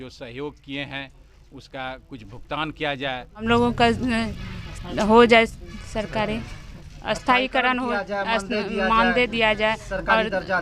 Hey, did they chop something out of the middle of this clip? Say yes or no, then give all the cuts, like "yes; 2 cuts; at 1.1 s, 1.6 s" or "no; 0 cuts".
yes; 1 cut; at 3.4 s